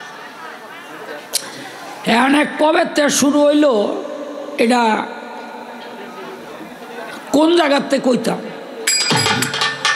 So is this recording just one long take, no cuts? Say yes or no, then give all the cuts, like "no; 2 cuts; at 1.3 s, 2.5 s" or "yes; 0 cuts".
yes; 0 cuts